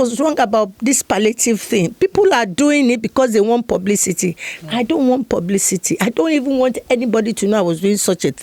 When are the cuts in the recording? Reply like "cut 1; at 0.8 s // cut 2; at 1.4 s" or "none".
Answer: none